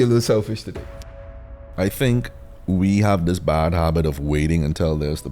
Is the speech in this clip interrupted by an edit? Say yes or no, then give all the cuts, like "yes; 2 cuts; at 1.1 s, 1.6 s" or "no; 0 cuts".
yes; 1 cut; at 1.0 s